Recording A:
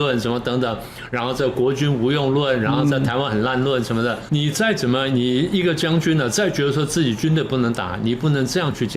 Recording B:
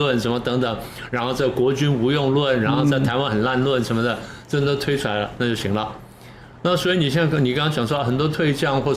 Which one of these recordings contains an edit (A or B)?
A